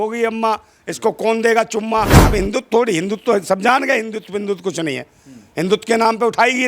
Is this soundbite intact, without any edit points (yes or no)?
no